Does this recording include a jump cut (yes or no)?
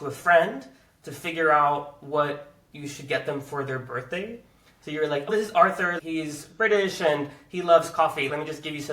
yes